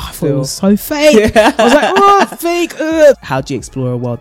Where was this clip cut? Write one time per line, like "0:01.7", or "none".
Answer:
0:03.2